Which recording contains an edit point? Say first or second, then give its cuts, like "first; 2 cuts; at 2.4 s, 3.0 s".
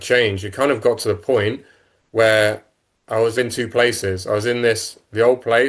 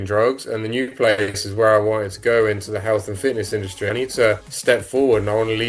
second; 1 cut; at 4.5 s